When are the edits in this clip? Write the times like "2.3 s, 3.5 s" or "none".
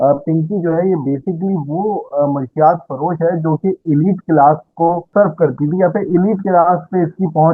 5.1 s